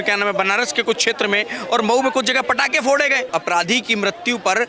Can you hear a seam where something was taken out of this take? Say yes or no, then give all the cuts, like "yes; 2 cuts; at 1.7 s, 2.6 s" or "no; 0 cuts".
yes; 1 cut; at 3.3 s